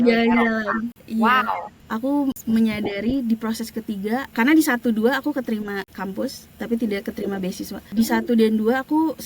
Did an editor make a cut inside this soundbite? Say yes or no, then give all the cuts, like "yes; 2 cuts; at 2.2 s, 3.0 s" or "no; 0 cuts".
yes; 5 cuts; at 1.0 s, 2.2 s, 4.3 s, 5.9 s, 7.9 s